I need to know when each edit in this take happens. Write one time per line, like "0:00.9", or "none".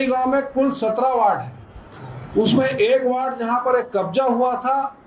none